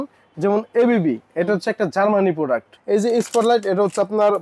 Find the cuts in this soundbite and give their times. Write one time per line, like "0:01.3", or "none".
0:02.7